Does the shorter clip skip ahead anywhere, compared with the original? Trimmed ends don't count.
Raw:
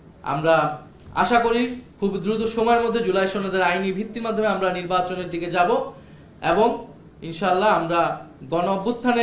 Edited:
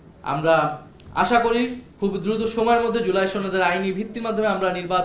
no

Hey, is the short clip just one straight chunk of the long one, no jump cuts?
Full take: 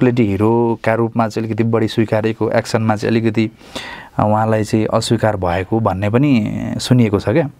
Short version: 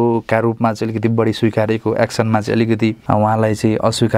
no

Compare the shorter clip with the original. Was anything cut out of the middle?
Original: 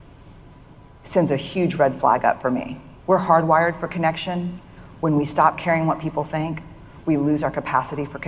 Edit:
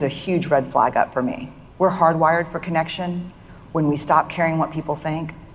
no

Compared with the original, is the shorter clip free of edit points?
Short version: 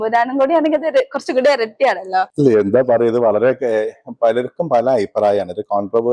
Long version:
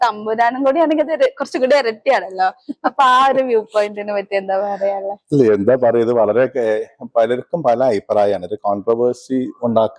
no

